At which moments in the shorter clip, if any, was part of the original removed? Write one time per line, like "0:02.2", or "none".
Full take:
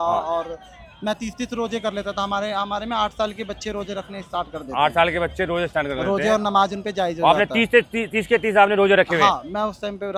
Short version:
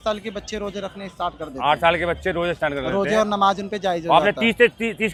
none